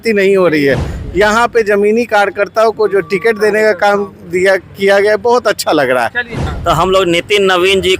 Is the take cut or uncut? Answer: cut